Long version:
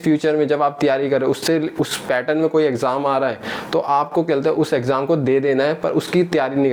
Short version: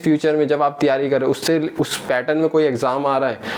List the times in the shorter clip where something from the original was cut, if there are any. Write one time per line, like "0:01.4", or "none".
none